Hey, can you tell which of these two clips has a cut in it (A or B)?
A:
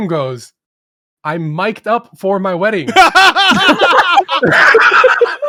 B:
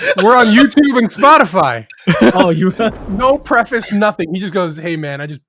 B